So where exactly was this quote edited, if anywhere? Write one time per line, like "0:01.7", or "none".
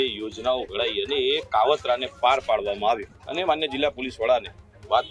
0:03.2